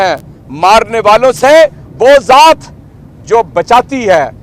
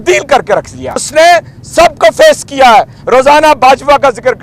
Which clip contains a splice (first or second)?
second